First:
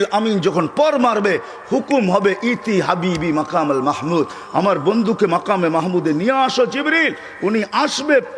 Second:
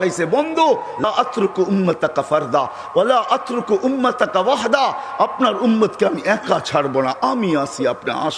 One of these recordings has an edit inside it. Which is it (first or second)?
second